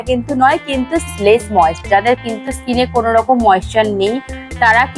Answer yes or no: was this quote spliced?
yes